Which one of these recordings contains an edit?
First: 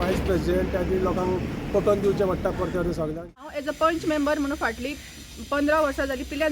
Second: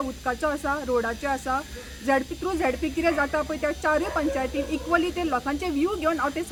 first; 1 cut; at 3.3 s

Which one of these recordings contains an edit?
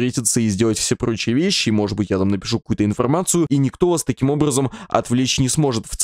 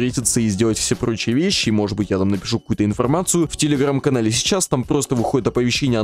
first; 1 cut; at 3.5 s

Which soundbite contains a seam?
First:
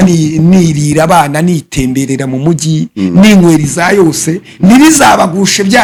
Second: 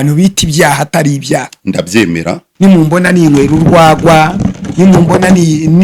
second; 1 cut; at 2.4 s

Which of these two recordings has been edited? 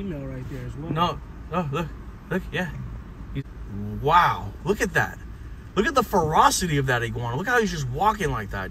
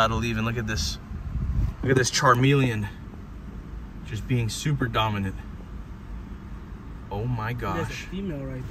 first; 1 cut; at 3.4 s

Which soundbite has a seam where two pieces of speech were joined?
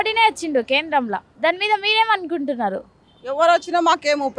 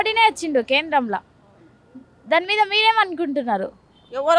first; 1 cut; at 1.3 s

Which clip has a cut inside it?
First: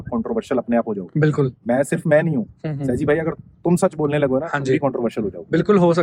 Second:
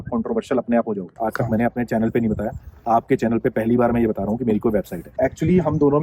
second; 2 cuts; at 1.2 s, 5.0 s

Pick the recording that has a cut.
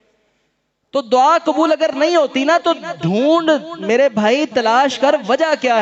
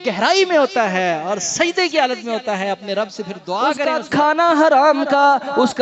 second; 1 cut; at 3.8 s

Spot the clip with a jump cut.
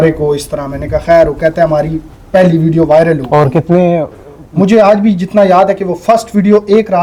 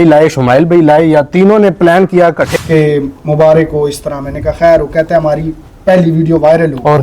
second; 1 cut; at 2.6 s

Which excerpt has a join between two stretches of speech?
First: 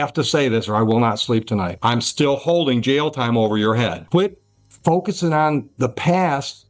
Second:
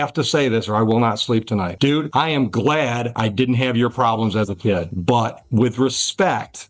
first; 2 cuts; at 1.7 s, 4.0 s

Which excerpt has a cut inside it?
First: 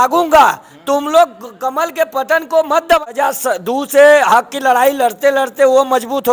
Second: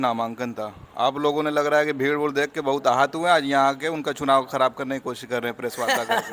first; 1 cut; at 3.1 s

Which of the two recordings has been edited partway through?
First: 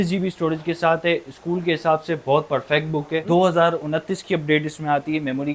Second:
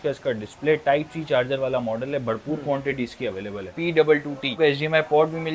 second; 2 cuts; at 3.6 s, 4.6 s

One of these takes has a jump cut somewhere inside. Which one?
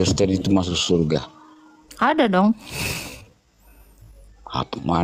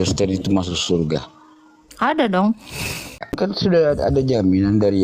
second; 1 cut; at 3.5 s

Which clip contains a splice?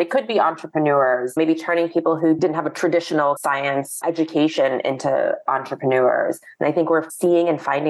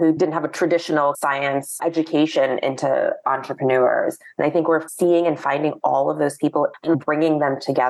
second; 1 cut; at 6.8 s

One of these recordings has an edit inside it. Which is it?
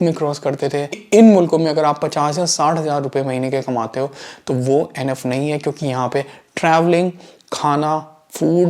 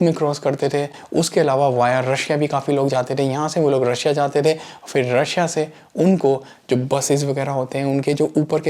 first; 1 cut; at 1.0 s

